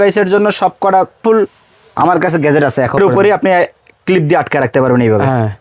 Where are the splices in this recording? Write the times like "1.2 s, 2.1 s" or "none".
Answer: 1.2 s, 3.0 s